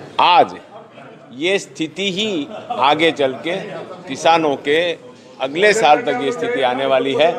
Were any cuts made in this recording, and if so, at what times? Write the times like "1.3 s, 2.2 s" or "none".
none